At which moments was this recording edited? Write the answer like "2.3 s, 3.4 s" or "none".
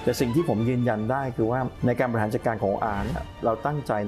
1.7 s

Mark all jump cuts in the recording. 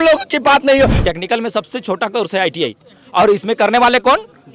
1.0 s

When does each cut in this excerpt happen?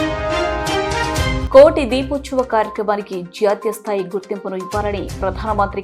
none

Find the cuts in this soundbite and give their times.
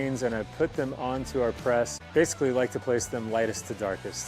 2.0 s

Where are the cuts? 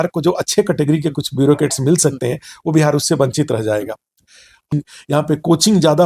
4.7 s

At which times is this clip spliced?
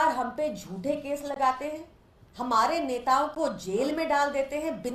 none

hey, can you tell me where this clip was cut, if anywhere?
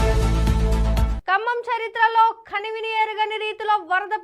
1.2 s

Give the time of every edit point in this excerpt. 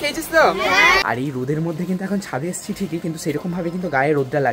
1.1 s

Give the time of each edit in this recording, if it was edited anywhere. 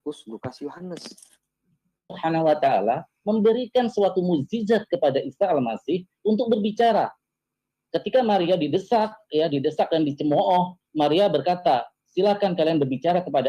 2.1 s

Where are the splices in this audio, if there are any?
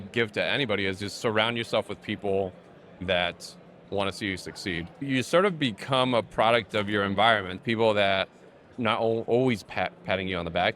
7.5 s

